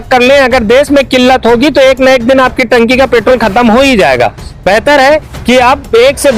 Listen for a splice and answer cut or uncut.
uncut